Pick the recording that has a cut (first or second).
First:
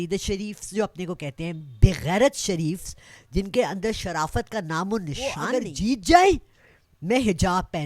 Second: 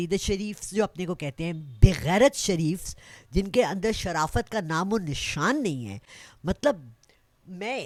first